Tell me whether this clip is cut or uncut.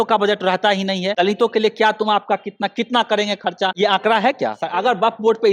cut